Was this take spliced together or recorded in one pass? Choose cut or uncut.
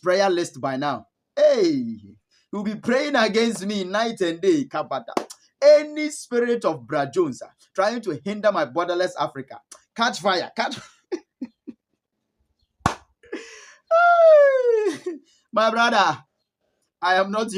uncut